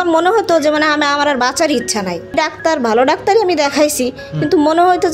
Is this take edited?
yes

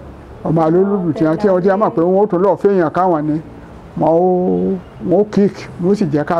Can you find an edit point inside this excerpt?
no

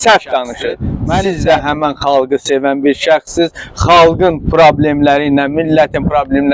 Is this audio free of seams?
no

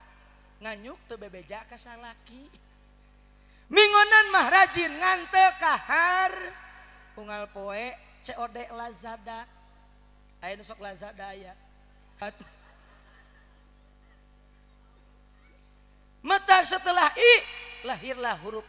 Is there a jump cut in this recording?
yes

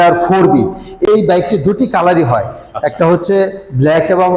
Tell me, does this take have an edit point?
yes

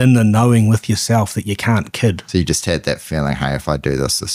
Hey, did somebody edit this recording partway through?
yes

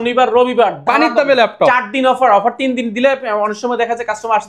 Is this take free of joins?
yes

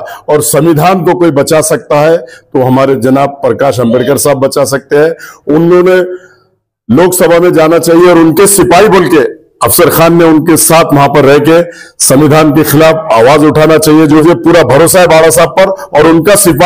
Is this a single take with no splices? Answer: no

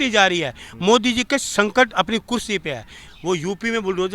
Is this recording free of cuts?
no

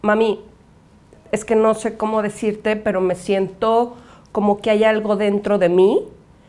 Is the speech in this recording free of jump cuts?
yes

